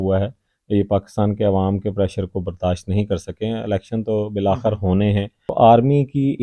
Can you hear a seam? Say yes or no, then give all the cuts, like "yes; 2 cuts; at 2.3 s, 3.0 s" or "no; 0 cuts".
yes; 1 cut; at 5.4 s